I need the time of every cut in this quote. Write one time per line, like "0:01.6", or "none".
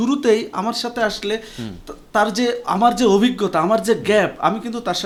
none